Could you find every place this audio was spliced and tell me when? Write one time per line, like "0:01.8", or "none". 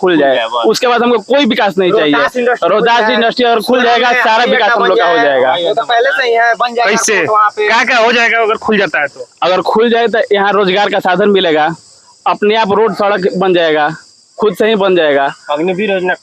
none